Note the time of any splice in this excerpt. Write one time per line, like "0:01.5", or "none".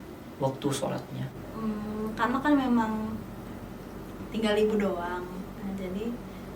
0:01.4